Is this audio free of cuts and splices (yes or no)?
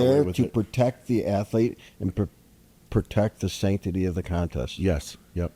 yes